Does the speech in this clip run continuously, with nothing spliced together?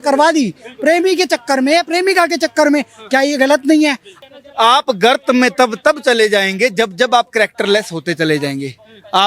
no; 1 cut; at 4.1 s

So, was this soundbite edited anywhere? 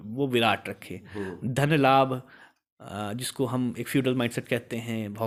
no; 0 cuts

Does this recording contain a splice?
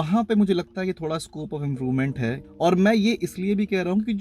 yes; 1 cut; at 2.4 s

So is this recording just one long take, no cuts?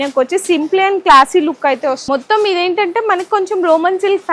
no; 1 cut; at 2.0 s

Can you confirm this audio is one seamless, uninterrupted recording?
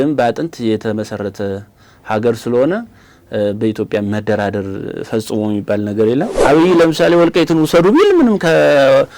no; 1 cut; at 6.3 s

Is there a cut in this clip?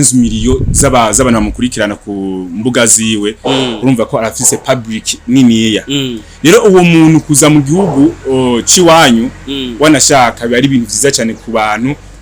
no; 0 cuts

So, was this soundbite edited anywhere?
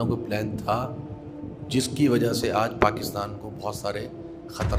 no; 0 cuts

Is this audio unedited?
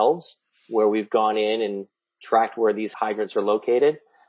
no; 1 cut; at 2.9 s

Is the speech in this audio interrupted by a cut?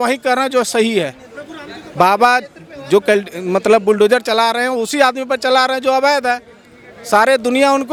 no; 0 cuts

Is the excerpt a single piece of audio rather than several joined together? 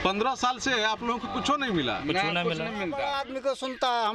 no; 1 cut; at 3.0 s

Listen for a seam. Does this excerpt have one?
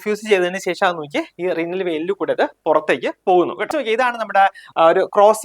yes; 1 cut; at 3.7 s

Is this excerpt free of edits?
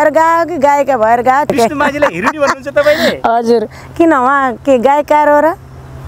no; 1 cut; at 1.5 s

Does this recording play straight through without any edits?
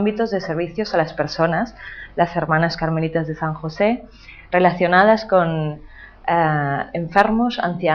yes; 0 cuts

